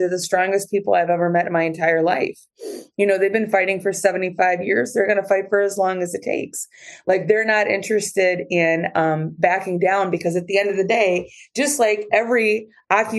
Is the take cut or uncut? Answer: uncut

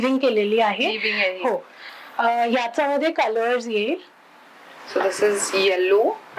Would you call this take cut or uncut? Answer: uncut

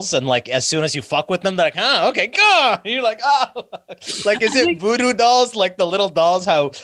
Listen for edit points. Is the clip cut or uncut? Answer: uncut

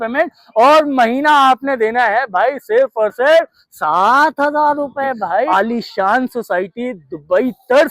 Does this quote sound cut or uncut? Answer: cut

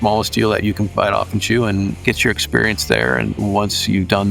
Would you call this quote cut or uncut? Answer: cut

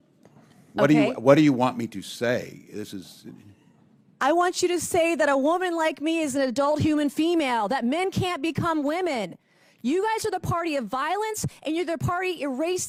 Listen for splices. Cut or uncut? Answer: uncut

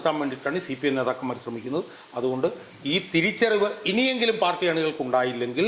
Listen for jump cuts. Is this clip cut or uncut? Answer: uncut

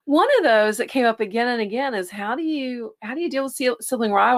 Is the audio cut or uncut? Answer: uncut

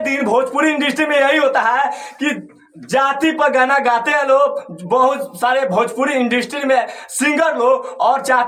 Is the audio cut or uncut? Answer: uncut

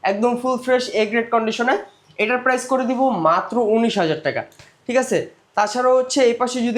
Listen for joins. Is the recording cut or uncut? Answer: uncut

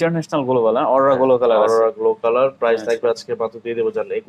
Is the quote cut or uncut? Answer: uncut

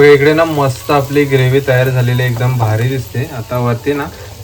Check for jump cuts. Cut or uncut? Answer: uncut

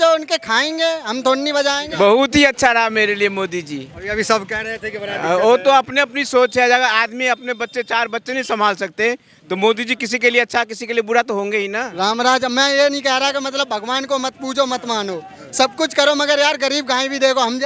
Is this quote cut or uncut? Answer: cut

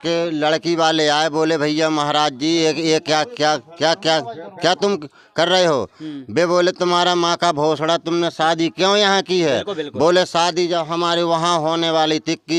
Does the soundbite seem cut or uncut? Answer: uncut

